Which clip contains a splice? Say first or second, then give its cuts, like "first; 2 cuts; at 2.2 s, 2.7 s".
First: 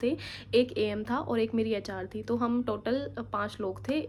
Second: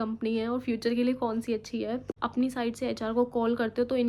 second; 1 cut; at 2.1 s